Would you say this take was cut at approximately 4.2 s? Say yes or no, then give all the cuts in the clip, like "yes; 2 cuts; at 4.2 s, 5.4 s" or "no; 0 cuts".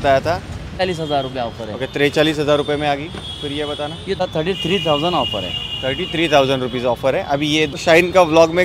yes; 3 cuts; at 0.8 s, 4.2 s, 7.7 s